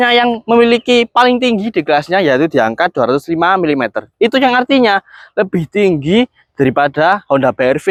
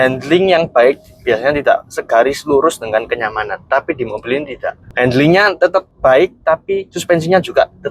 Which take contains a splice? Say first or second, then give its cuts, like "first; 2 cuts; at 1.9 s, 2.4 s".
second; 3 cuts; at 4.8 s, 5.6 s, 6.9 s